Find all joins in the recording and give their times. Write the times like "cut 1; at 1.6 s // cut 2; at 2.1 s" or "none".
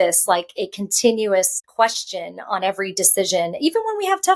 cut 1; at 1.6 s